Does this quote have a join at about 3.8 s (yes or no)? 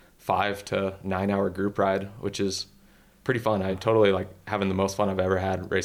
yes